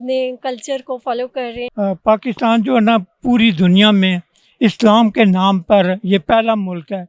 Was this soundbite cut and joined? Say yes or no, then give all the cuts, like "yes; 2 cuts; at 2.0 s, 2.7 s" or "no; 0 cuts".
yes; 1 cut; at 1.6 s